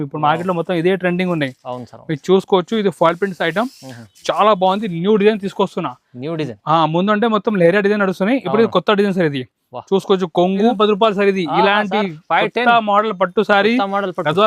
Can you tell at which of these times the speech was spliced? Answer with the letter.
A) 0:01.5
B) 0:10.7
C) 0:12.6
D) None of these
B